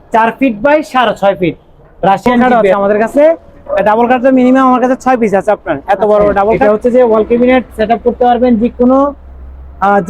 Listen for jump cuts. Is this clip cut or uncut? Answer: cut